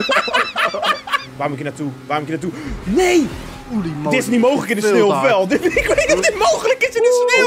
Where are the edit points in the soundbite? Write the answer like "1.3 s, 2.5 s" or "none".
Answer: 1.3 s